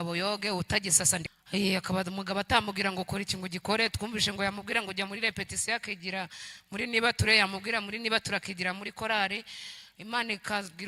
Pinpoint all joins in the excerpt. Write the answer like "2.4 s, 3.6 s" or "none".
1.3 s